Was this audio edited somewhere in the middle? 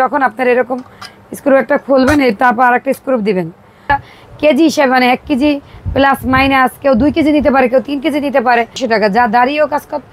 yes; 2 cuts; at 3.9 s, 8.7 s

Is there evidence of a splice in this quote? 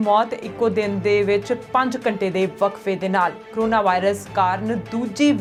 no; 0 cuts

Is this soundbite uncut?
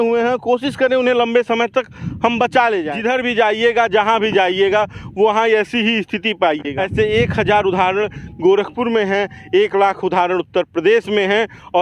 no; 2 cuts; at 2.9 s, 6.7 s

